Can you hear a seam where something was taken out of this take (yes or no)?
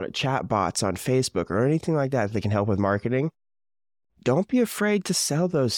no